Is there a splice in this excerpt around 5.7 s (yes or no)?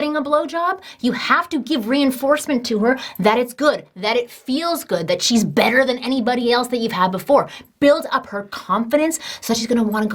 no